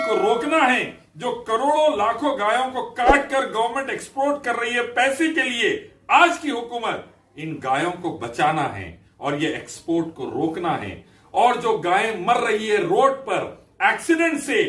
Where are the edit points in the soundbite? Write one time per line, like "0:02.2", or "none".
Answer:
none